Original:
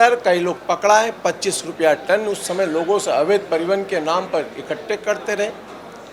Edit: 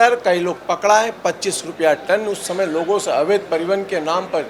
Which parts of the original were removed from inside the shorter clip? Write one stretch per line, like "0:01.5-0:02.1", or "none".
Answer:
none